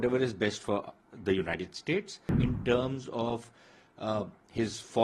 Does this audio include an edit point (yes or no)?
yes